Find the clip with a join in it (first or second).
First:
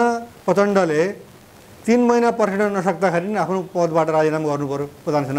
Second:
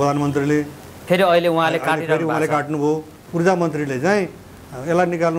second